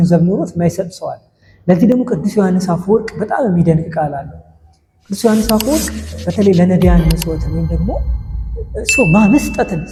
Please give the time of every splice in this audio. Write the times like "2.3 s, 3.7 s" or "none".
none